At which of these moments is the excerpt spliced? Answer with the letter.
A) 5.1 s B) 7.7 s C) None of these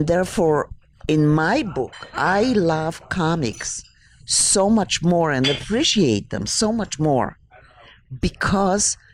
C